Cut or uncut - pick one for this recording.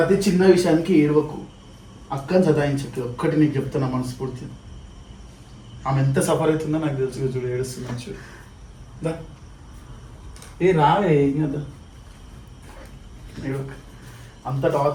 uncut